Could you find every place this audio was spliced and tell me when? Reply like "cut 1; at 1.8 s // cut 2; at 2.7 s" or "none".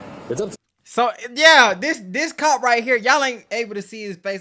none